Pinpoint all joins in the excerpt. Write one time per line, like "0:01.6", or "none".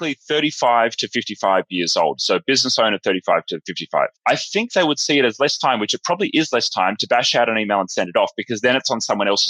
0:03.9